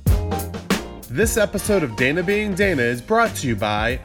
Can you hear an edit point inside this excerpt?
yes; 1 cut; at 1.0 s

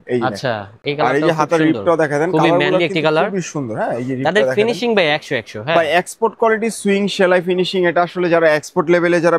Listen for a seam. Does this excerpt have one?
no; 0 cuts

